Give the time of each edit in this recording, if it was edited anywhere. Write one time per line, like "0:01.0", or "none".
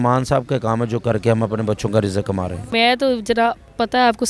0:02.6